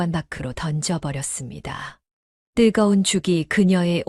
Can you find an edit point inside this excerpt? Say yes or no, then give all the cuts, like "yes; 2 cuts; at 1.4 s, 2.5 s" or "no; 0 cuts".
no; 0 cuts